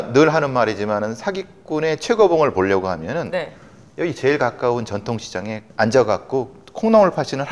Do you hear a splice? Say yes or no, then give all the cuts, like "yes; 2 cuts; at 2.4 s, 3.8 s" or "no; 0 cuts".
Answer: no; 0 cuts